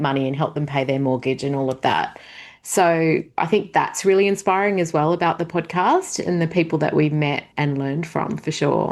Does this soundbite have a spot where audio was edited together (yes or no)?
yes